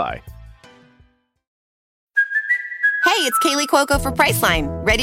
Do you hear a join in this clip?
no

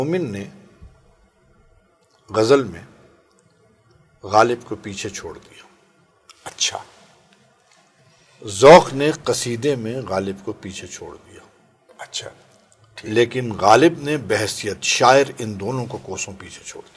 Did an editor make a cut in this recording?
no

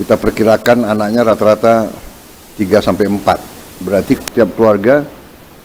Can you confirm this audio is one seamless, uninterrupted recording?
yes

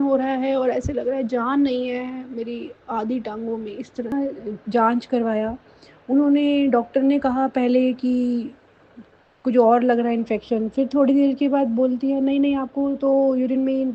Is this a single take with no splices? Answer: no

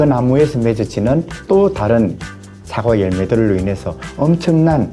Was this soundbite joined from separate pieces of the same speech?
no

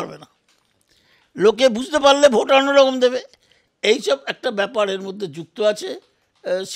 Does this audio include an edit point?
no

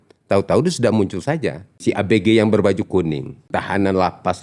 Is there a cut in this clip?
yes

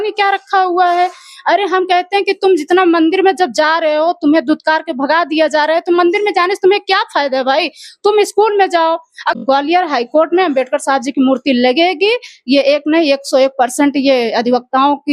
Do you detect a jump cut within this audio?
yes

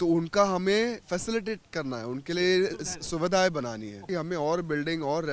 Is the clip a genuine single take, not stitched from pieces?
no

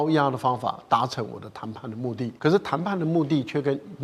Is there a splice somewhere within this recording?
yes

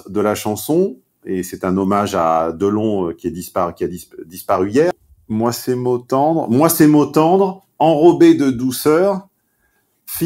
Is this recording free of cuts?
no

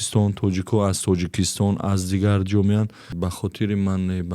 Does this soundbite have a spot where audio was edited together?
yes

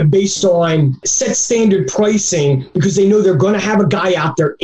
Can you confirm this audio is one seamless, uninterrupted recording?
yes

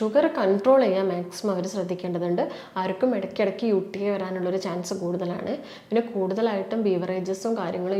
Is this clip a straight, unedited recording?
yes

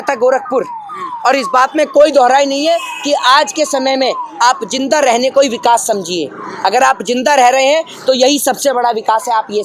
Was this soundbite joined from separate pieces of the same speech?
no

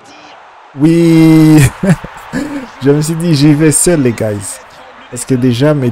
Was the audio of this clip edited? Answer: no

